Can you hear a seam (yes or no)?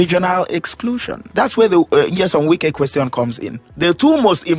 yes